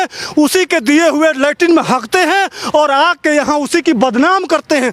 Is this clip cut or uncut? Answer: uncut